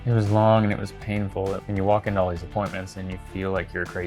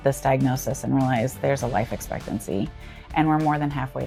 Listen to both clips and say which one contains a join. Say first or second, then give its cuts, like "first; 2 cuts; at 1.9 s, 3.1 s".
first; 1 cut; at 1.6 s